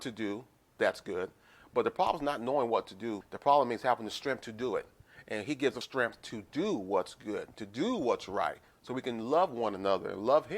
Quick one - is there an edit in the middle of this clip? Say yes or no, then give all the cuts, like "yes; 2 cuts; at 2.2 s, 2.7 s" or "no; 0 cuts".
yes; 2 cuts; at 3.2 s, 5.8 s